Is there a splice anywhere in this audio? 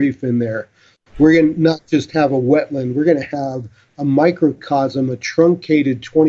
no; 0 cuts

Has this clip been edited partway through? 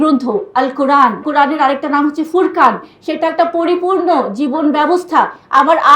yes; 1 cut; at 1.2 s

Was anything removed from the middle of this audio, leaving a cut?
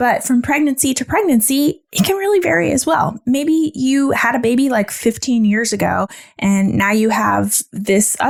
no; 0 cuts

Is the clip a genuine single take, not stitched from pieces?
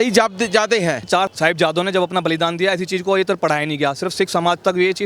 no; 1 cut; at 1.2 s

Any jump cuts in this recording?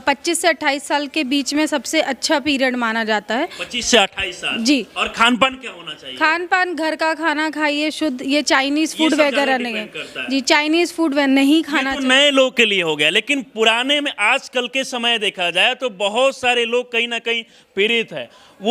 no; 0 cuts

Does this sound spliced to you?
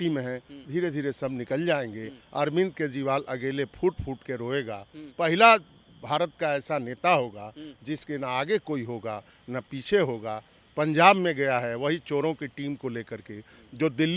no; 0 cuts

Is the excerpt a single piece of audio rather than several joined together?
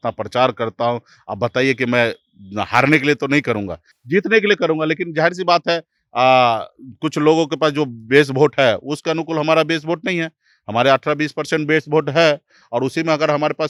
yes; 0 cuts

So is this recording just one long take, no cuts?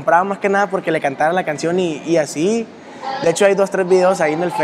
yes; 0 cuts

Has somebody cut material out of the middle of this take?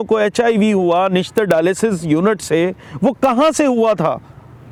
no; 0 cuts

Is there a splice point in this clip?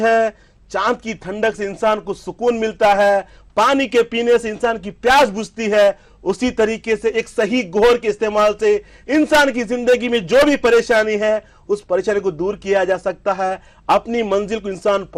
no; 0 cuts

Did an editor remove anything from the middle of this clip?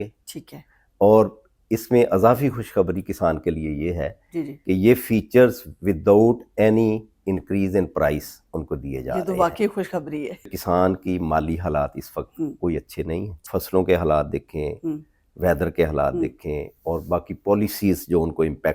yes; 2 cuts; at 10.5 s, 13.4 s

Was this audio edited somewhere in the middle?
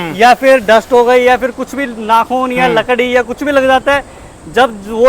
no; 0 cuts

